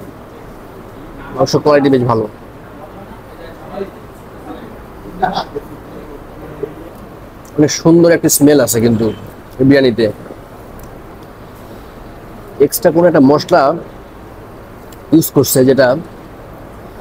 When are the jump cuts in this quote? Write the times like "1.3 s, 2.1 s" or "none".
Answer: 6.9 s, 11.1 s